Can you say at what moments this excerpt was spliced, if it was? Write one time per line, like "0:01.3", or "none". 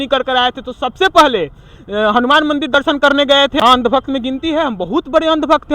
0:03.6